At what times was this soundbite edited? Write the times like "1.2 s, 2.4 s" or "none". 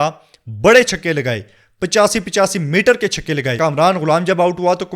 3.5 s